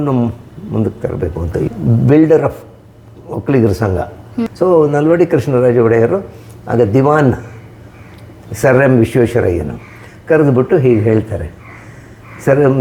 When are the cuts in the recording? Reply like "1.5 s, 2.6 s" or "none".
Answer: 1.7 s, 4.5 s